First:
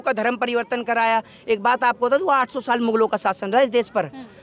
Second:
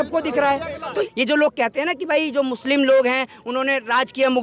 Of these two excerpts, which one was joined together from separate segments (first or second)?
second